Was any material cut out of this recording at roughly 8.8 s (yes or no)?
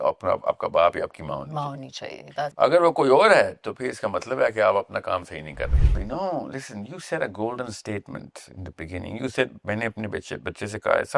no